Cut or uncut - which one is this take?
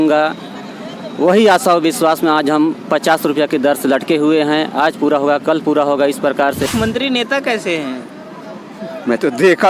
cut